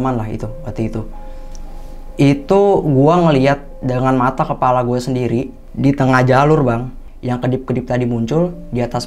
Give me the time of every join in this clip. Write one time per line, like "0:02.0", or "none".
none

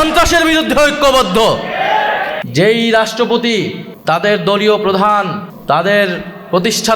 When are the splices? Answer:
0:02.4
0:03.9
0:05.5

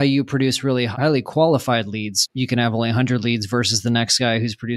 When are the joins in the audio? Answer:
0:00.9
0:02.2

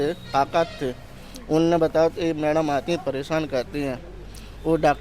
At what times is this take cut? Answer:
none

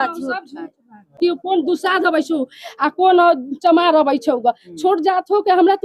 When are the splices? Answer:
0:01.1

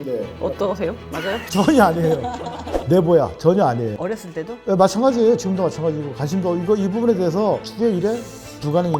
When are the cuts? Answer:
0:02.7

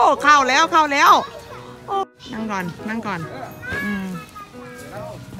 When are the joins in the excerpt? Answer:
0:02.0

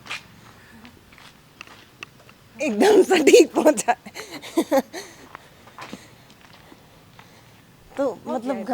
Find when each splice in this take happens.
none

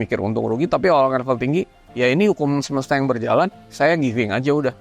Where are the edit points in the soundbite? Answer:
none

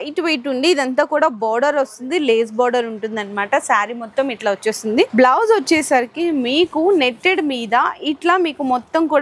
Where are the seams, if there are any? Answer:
none

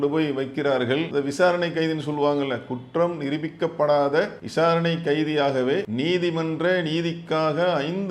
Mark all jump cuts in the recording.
0:01.1
0:04.4
0:05.9

